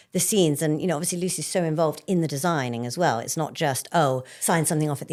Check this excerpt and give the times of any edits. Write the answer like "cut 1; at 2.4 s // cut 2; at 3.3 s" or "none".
none